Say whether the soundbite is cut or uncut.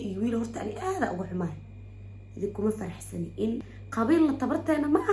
uncut